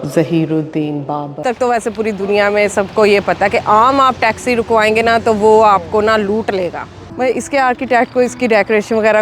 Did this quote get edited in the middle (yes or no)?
yes